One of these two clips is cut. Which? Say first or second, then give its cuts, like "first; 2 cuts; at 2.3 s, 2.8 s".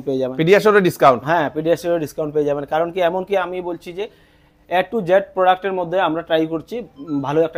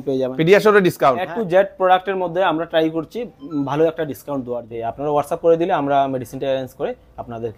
second; 2 cuts; at 1.2 s, 4.7 s